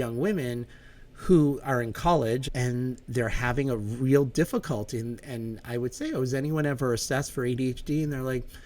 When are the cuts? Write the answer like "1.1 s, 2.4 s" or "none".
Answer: 2.4 s